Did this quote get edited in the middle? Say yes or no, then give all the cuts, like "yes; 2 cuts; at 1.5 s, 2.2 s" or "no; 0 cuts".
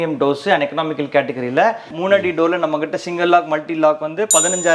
yes; 1 cut; at 1.9 s